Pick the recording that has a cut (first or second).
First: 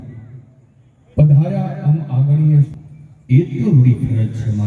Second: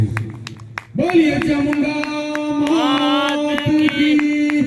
first